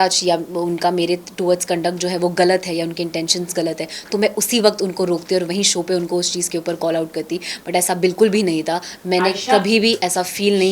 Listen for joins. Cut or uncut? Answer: uncut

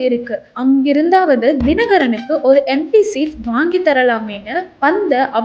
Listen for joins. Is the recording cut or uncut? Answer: cut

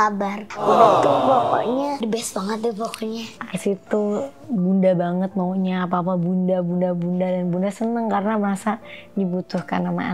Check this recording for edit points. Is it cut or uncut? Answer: cut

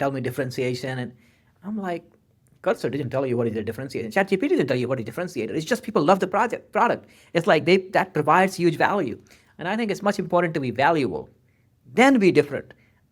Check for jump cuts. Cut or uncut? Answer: uncut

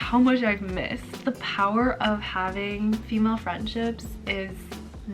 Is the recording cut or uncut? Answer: cut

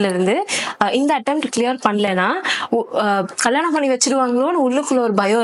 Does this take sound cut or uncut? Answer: uncut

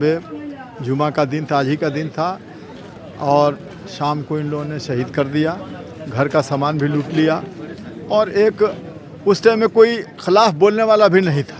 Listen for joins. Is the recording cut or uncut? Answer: uncut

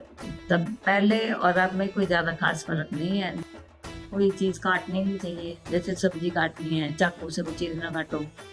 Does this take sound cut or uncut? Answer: cut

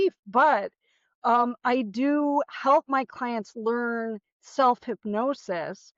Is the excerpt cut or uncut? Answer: uncut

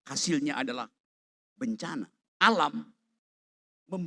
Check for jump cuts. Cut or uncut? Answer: cut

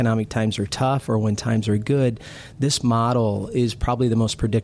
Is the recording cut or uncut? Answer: uncut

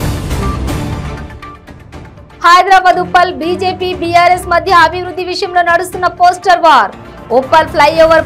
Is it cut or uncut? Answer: cut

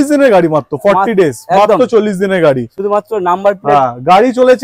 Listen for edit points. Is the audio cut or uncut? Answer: uncut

